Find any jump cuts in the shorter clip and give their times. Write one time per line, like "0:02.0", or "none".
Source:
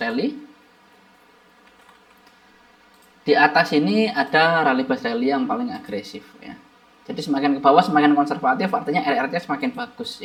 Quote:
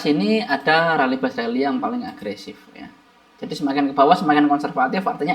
none